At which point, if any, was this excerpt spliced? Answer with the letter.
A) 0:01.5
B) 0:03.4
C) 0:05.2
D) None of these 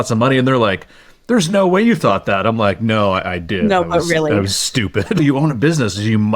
C